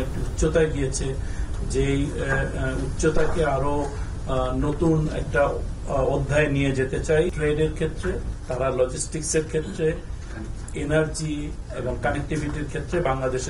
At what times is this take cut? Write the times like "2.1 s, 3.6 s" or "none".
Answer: 7.3 s, 8.3 s